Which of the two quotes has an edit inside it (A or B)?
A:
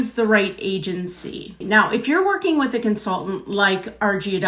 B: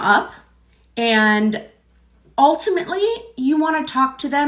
A